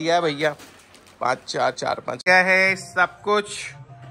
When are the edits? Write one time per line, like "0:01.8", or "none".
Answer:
0:02.2